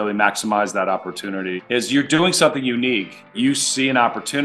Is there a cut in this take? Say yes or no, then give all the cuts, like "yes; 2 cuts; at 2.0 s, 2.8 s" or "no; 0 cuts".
yes; 2 cuts; at 1.6 s, 3.3 s